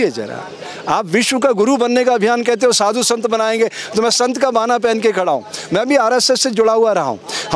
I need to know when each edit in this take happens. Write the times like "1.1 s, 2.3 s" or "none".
none